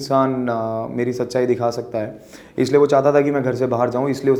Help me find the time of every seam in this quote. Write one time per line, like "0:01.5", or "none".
none